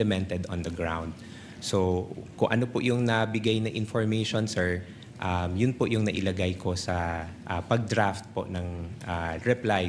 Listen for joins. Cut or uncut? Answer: uncut